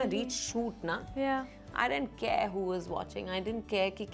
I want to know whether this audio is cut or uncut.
uncut